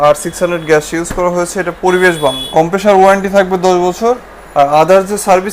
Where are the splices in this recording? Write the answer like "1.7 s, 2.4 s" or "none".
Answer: 2.4 s